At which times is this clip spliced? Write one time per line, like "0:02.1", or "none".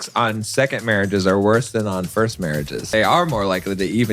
0:02.8